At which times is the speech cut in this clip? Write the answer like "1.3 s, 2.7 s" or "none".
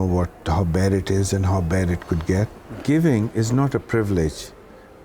2.8 s